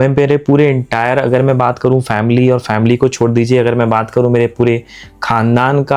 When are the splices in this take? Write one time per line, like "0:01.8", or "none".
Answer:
none